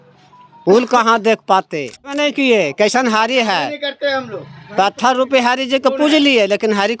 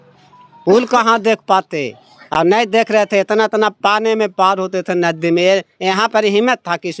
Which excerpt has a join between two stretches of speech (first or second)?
first